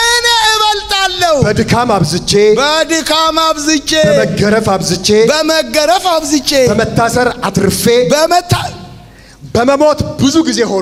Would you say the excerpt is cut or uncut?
uncut